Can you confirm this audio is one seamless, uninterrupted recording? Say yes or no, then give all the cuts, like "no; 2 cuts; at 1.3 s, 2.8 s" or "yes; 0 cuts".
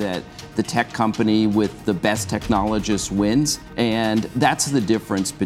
no; 1 cut; at 3.6 s